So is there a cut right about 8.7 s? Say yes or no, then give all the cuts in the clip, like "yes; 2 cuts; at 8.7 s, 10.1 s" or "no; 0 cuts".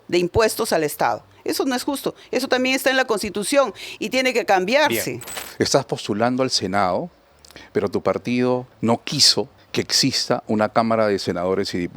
yes; 3 cuts; at 5.3 s, 8.7 s, 9.6 s